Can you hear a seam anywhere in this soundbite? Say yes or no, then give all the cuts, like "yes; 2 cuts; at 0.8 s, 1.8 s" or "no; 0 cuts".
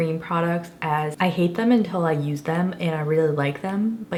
no; 0 cuts